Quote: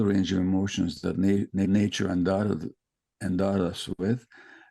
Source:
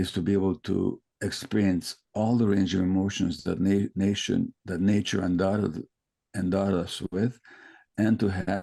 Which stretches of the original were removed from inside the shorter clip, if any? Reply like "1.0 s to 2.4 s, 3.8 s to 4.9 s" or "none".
4.1 s to 4.8 s